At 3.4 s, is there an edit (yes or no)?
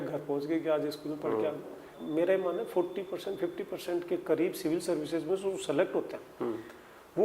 no